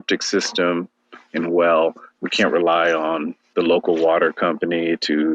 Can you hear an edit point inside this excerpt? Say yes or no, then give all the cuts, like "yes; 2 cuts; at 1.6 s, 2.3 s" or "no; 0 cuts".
no; 0 cuts